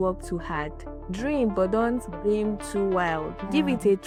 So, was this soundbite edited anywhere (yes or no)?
no